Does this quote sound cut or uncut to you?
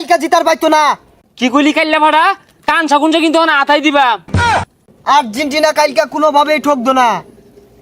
cut